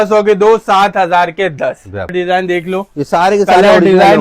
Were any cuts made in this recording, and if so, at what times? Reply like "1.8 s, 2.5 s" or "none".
2.1 s